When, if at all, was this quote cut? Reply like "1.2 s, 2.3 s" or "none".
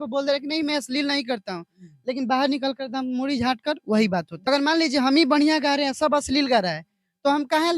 4.5 s